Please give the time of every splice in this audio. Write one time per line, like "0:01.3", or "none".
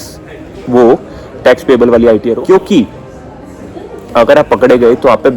0:02.3